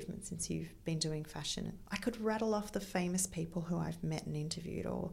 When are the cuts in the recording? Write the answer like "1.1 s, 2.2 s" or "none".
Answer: 1.8 s

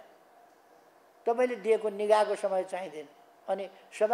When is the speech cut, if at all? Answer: none

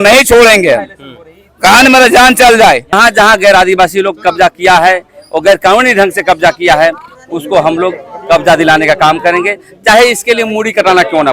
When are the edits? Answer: 2.9 s

